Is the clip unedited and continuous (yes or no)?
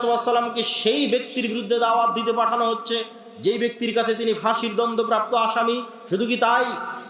yes